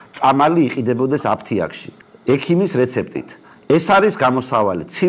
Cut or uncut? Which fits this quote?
uncut